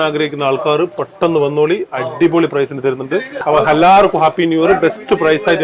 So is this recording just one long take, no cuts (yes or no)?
no